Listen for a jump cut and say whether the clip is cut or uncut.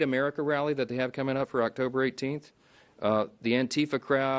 uncut